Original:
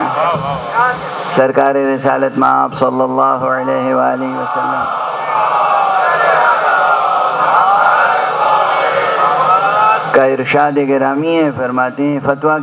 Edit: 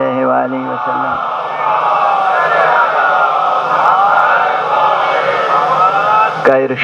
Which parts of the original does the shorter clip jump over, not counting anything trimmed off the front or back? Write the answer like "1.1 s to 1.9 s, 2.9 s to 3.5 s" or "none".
none